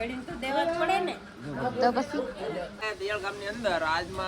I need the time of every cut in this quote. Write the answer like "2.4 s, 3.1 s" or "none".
2.8 s